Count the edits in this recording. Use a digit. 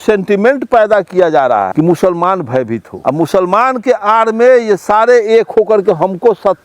2